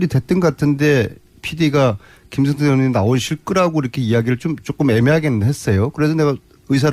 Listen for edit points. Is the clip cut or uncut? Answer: cut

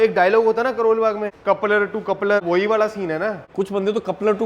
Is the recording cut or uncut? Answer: cut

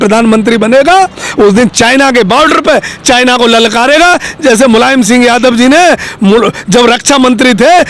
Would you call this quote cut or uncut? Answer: uncut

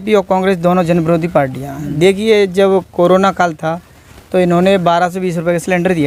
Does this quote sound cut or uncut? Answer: uncut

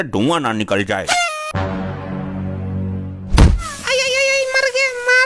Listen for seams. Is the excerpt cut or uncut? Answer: cut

